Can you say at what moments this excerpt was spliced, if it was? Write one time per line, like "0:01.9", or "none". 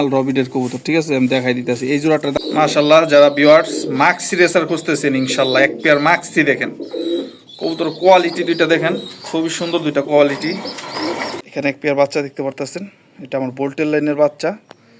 0:02.3
0:11.4